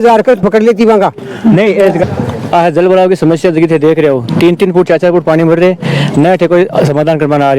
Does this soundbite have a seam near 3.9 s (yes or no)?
no